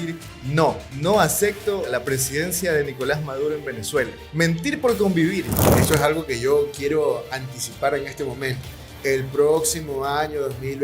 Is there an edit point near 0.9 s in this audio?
yes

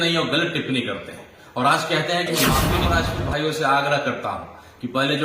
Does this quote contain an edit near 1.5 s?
no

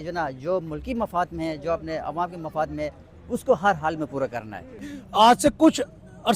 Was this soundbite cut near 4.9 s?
yes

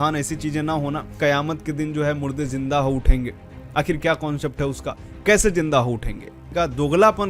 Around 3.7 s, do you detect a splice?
no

